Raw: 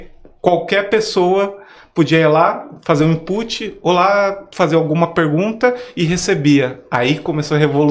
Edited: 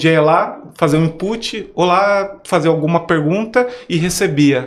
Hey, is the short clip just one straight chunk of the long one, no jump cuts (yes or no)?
yes